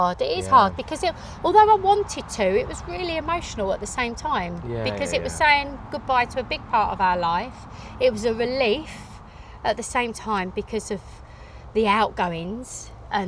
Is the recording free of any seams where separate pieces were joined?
yes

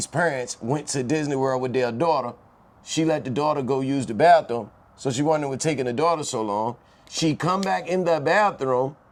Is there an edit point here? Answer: no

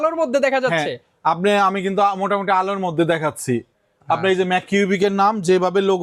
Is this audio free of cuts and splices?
yes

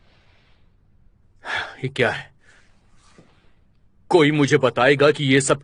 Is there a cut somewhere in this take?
no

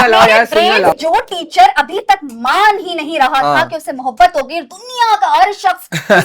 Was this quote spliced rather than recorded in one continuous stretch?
yes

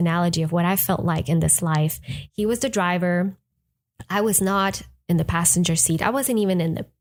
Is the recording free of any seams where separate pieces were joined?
yes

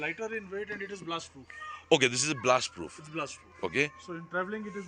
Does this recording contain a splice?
no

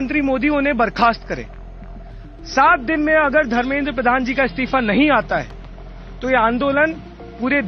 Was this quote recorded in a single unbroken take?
yes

